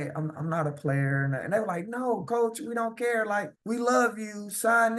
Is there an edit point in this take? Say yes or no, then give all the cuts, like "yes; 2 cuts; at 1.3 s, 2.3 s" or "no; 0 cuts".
yes; 1 cut; at 3.5 s